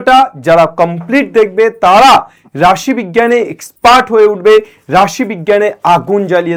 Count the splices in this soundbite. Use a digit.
0